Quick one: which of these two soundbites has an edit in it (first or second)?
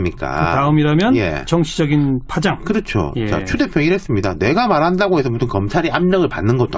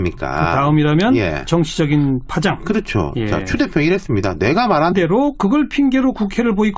first